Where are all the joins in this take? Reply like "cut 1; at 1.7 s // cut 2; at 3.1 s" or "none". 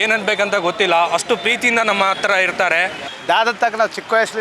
cut 1; at 3.1 s